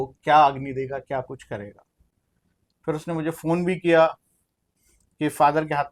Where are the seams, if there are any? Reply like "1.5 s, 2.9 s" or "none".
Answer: none